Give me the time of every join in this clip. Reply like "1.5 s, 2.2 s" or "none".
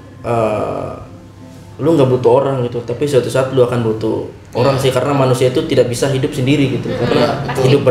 none